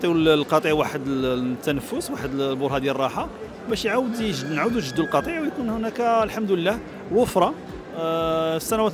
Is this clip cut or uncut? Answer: uncut